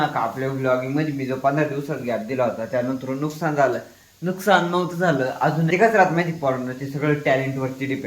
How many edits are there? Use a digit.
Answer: 1